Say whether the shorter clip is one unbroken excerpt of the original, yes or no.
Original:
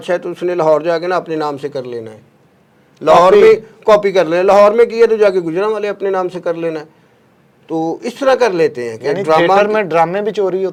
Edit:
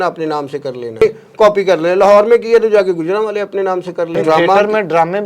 no